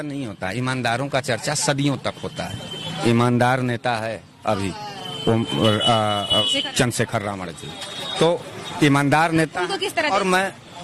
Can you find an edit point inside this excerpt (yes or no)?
no